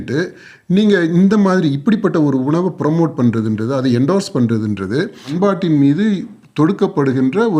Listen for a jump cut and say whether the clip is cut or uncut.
cut